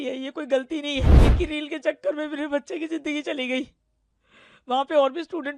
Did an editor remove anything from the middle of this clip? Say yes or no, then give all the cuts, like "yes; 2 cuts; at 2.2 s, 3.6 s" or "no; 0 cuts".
yes; 1 cut; at 1.2 s